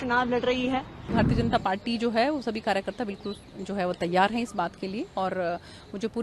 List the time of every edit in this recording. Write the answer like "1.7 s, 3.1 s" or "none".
1.1 s

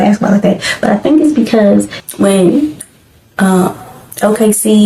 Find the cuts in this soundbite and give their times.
none

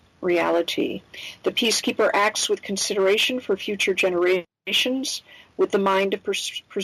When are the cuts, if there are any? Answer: none

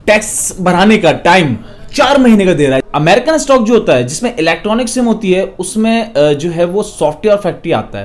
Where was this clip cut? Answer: 2.8 s

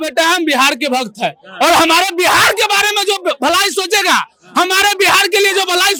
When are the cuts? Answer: none

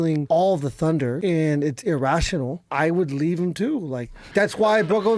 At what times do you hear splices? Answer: 1.2 s, 2.7 s, 4.2 s

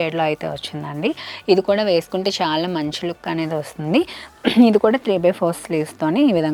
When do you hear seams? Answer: none

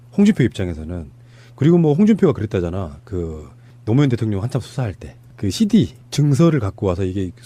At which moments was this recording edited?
5.6 s

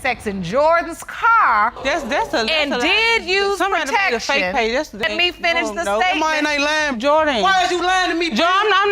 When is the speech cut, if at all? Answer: 1.8 s, 5.0 s

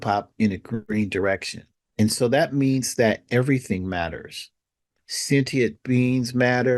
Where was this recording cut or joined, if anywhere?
0.8 s, 4.9 s

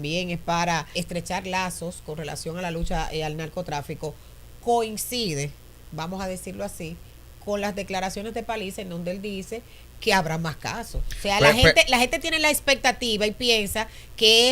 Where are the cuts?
0.9 s

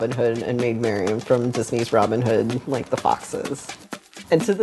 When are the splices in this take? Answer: 3.6 s

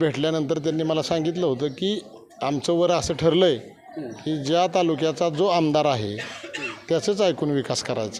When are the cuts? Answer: none

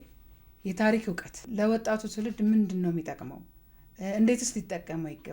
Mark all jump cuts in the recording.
1.3 s

